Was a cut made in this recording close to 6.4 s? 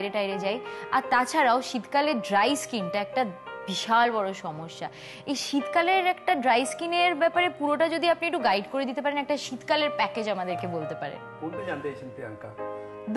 no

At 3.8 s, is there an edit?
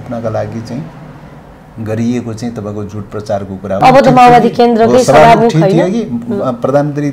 yes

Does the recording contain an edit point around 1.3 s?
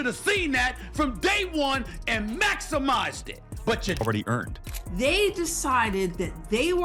no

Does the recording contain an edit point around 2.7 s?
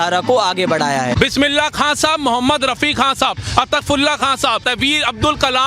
no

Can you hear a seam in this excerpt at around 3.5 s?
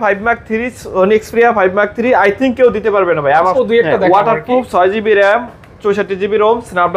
yes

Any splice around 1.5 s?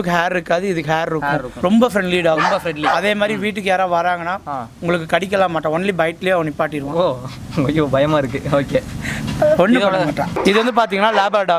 yes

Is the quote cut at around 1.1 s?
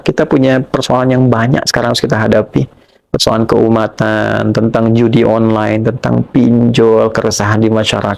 no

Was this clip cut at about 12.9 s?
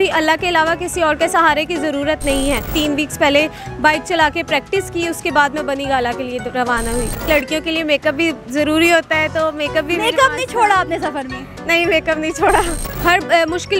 yes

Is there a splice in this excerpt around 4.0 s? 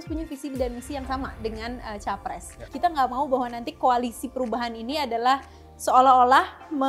no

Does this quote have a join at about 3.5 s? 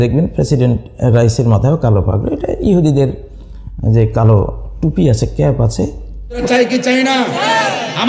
no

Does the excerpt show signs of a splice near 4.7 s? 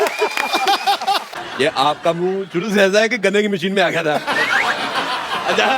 no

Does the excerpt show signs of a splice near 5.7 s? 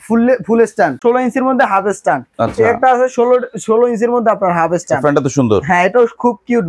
no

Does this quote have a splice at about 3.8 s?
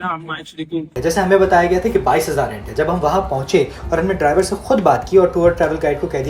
no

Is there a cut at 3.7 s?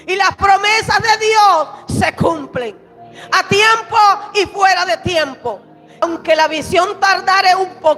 no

